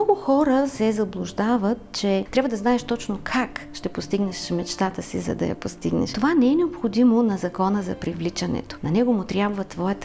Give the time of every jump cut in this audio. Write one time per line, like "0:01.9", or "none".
0:02.3
0:06.1
0:08.7